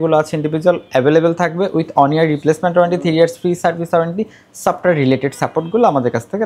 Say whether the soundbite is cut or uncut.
uncut